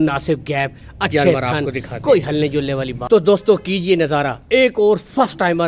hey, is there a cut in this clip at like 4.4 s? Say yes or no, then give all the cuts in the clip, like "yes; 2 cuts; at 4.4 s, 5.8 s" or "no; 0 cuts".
no; 1 cut; at 3.0 s